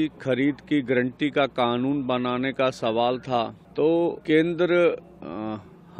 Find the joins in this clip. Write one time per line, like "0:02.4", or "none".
0:03.6
0:04.2